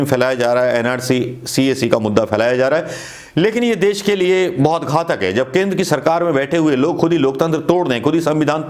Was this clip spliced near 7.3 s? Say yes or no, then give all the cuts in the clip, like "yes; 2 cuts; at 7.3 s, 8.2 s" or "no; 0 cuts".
no; 0 cuts